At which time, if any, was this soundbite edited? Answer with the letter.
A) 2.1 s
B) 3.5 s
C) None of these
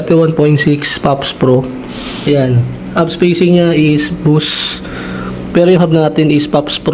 A